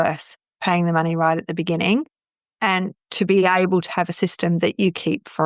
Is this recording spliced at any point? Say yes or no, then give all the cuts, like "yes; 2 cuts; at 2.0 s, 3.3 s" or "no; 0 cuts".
no; 0 cuts